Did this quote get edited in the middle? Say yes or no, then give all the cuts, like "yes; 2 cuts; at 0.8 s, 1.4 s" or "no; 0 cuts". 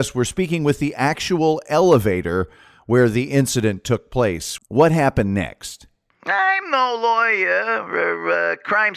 yes; 1 cut; at 4.5 s